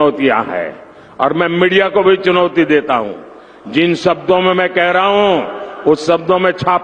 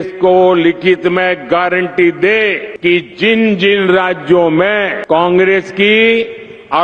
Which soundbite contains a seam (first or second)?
second